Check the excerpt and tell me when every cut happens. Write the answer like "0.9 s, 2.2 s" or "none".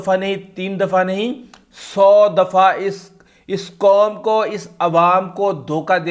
none